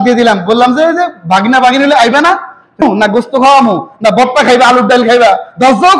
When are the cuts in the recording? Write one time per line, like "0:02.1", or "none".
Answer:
0:02.8